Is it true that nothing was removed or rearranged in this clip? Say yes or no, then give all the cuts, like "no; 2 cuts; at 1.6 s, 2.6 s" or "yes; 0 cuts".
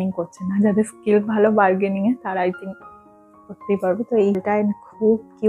no; 1 cut; at 4.4 s